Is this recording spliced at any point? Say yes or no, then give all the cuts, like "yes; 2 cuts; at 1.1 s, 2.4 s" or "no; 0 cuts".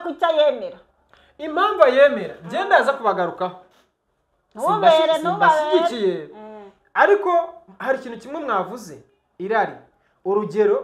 no; 0 cuts